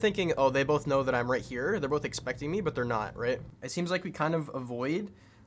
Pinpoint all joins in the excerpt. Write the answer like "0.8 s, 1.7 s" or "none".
3.6 s

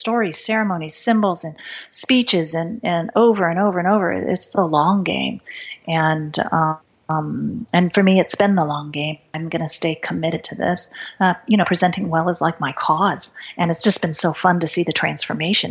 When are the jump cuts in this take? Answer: 6.9 s, 9.3 s

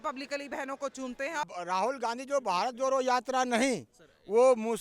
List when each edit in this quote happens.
1.5 s

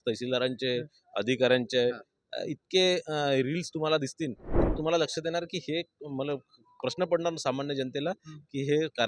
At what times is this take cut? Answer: 4.7 s

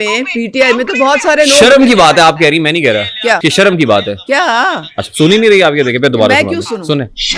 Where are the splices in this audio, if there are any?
3.4 s

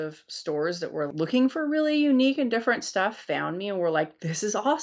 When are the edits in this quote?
1.1 s

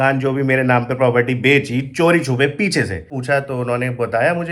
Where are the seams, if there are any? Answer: 3.1 s

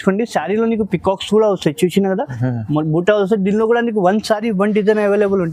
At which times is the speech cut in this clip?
none

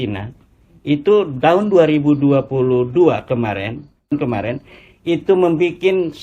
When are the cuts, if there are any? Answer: 4.1 s

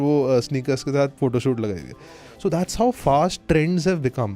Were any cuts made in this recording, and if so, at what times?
1.1 s, 3.4 s

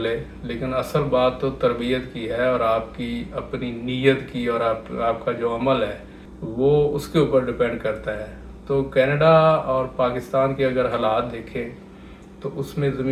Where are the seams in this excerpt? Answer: none

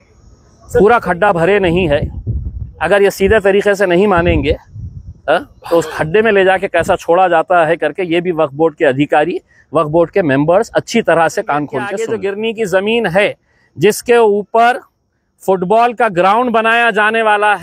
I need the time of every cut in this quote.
12.0 s

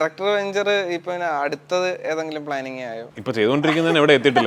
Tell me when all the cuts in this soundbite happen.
3.1 s

